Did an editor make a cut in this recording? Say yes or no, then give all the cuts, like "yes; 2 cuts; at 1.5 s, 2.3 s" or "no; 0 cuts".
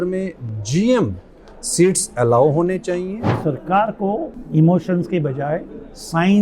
yes; 2 cuts; at 3.4 s, 4.4 s